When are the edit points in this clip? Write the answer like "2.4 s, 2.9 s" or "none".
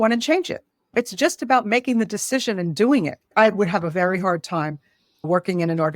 3.2 s